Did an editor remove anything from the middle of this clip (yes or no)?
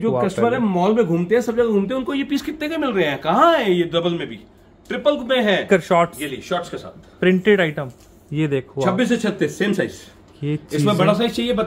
yes